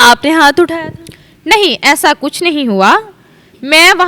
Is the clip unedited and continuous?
yes; 0 cuts

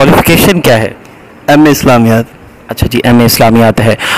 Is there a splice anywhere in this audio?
no; 0 cuts

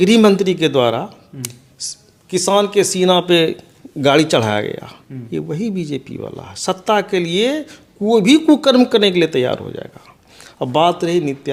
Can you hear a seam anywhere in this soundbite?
no; 0 cuts

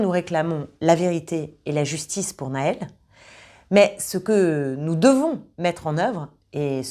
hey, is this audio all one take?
yes; 0 cuts

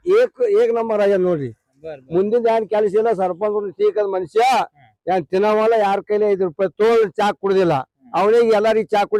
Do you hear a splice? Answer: no; 0 cuts

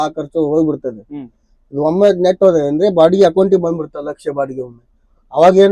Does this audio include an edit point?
no; 0 cuts

